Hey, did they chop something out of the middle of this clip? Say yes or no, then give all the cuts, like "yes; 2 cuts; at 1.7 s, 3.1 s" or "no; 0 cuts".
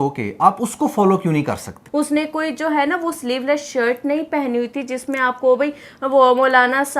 yes; 1 cut; at 1.8 s